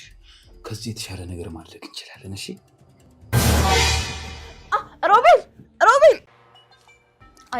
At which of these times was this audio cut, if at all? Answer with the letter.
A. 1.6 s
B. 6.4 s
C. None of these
B